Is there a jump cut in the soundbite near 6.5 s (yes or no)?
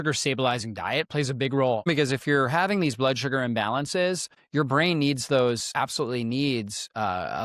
no